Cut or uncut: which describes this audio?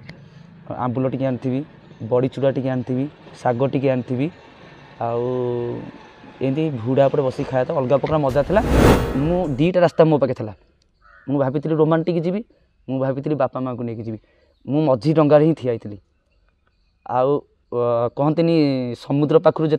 cut